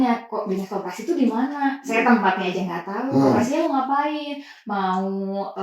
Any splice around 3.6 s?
yes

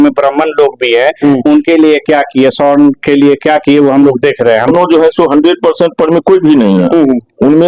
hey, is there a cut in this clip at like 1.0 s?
no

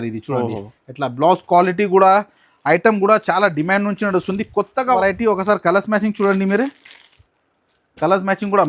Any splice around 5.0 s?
yes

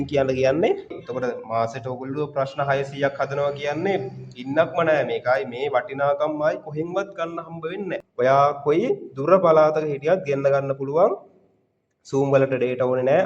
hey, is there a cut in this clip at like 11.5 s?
no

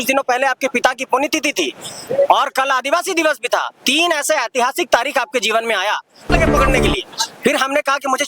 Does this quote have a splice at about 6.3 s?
yes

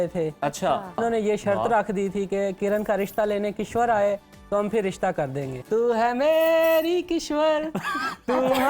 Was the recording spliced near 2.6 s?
yes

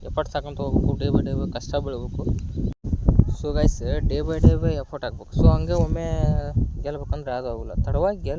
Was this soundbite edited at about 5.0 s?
no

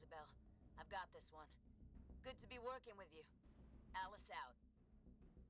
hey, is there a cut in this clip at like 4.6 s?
yes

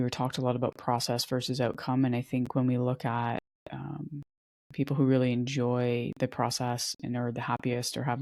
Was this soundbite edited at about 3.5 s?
no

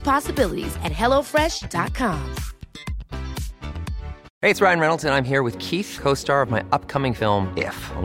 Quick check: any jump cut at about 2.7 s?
no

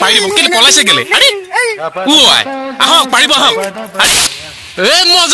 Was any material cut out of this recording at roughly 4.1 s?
yes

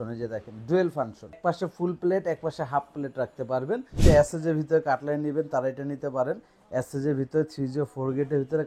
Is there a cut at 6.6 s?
no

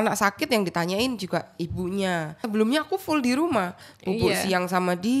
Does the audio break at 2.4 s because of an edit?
yes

